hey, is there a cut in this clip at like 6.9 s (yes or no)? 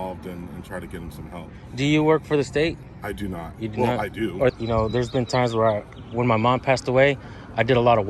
no